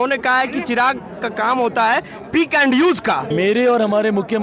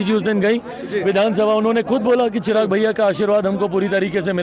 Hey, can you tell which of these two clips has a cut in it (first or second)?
first